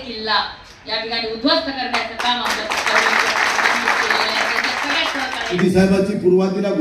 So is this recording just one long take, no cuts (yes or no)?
no